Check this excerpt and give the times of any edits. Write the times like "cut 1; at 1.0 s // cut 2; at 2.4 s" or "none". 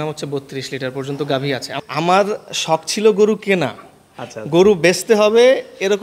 cut 1; at 1.7 s